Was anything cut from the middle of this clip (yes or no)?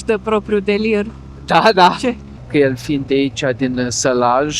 yes